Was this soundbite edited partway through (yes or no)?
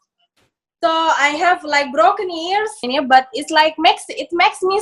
yes